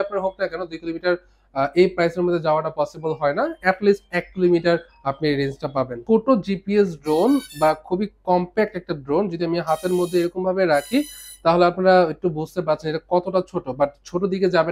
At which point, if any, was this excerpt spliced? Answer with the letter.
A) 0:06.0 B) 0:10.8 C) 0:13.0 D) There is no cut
A